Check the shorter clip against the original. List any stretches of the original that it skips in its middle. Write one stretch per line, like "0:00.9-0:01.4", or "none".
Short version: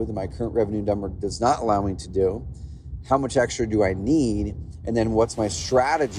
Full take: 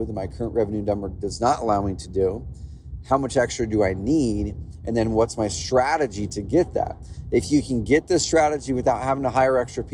none